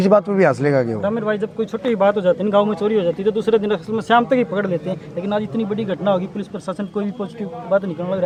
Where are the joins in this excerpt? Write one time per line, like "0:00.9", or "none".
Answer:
none